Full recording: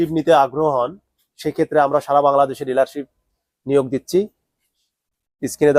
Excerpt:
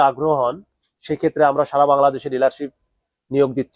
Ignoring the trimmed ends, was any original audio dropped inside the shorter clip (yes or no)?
no